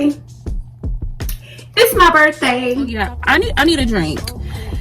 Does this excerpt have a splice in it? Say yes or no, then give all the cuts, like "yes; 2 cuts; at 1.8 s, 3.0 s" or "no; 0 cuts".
yes; 1 cut; at 3.0 s